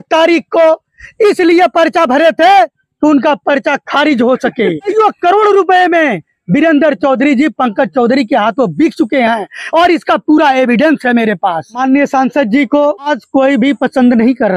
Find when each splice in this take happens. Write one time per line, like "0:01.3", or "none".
0:04.9
0:11.8
0:13.1